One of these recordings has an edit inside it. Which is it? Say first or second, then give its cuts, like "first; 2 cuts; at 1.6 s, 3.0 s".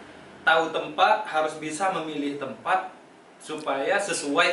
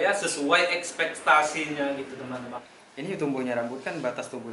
second; 1 cut; at 2.5 s